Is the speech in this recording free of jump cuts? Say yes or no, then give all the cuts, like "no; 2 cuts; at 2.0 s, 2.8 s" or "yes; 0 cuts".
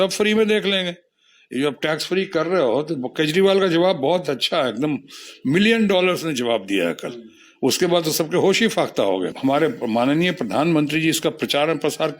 no; 1 cut; at 9.3 s